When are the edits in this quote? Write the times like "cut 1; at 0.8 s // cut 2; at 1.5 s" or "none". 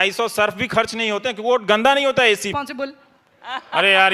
cut 1; at 2.5 s